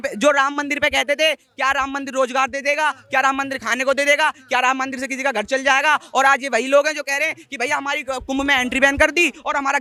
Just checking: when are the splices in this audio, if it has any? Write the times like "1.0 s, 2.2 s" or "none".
none